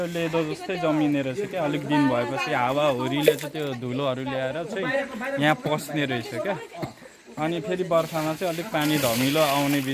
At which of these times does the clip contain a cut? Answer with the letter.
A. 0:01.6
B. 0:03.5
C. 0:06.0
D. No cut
D